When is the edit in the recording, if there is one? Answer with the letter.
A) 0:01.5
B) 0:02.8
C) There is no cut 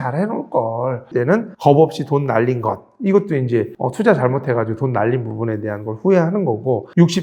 C